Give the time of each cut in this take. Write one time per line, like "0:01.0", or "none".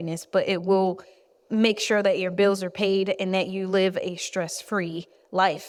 none

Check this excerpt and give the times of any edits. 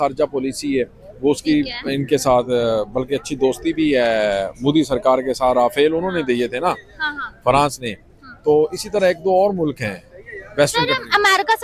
none

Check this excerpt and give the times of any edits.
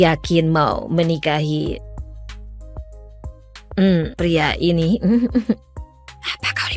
0:01.8
0:03.4

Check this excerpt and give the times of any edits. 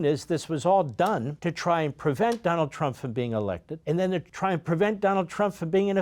0:01.3
0:03.7
0:04.3

